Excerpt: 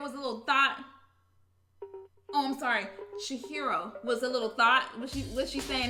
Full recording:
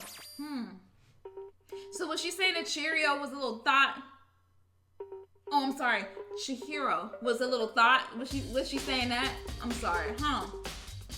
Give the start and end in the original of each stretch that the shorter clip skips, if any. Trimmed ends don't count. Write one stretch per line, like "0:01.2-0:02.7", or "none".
none